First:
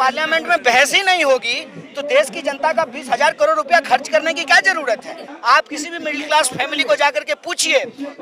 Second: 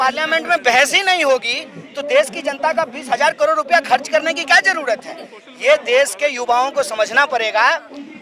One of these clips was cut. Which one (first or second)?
first